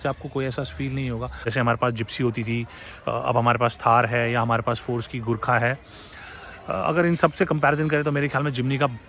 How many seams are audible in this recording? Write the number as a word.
one